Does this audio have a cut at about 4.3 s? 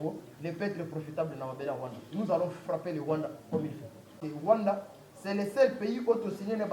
yes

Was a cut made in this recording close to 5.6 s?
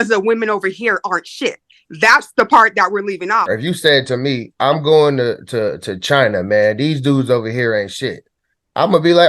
no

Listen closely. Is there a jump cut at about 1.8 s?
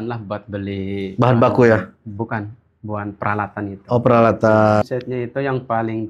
no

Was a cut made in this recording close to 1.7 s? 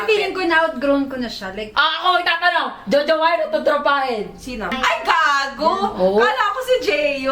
yes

